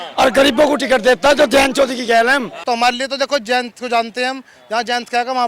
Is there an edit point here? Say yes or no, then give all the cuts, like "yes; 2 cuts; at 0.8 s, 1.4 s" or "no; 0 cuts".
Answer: yes; 1 cut; at 2.5 s